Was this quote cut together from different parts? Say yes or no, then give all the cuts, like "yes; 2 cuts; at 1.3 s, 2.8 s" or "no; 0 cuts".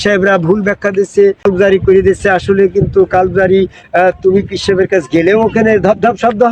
yes; 1 cut; at 1.4 s